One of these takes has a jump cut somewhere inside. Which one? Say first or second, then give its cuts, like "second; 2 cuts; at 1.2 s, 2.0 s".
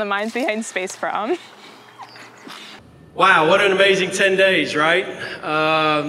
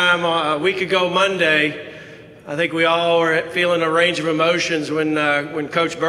first; 1 cut; at 2.7 s